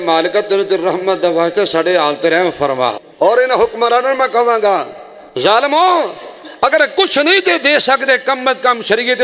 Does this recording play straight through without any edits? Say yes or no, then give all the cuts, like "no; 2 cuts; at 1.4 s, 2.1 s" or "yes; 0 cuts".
no; 1 cut; at 3.0 s